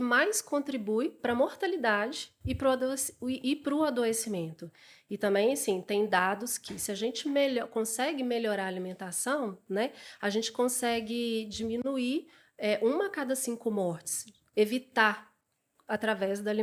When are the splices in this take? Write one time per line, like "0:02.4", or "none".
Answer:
none